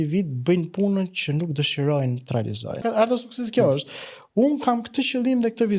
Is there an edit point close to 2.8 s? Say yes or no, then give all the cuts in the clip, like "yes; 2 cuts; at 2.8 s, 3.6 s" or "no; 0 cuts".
yes; 1 cut; at 2.8 s